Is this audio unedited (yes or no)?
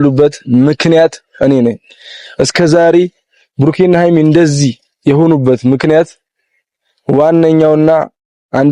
yes